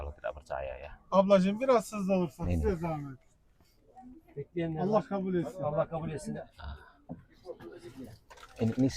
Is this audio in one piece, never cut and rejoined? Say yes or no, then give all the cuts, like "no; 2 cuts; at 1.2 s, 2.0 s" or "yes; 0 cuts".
yes; 0 cuts